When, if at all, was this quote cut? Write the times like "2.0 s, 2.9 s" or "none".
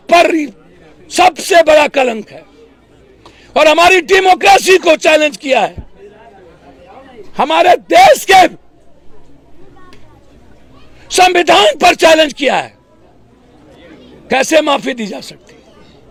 none